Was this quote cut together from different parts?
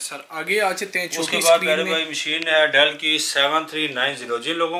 no; 0 cuts

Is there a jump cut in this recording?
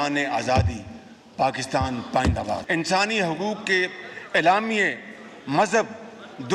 yes; 1 cut; at 2.6 s

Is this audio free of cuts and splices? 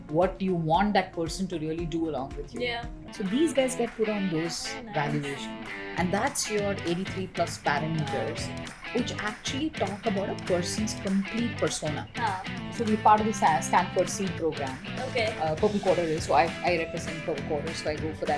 no; 2 cuts; at 3.1 s, 12.7 s

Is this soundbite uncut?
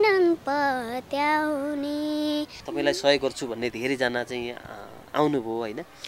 no; 1 cut; at 2.6 s

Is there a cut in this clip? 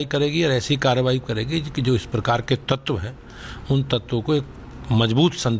no; 0 cuts

